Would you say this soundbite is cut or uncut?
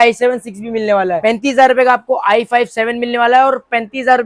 uncut